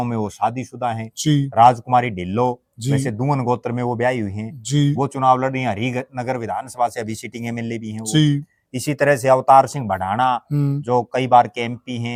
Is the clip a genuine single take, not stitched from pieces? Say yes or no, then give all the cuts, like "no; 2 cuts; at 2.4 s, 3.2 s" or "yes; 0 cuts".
yes; 0 cuts